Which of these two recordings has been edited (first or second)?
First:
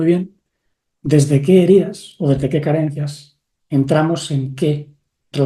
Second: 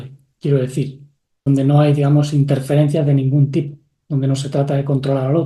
second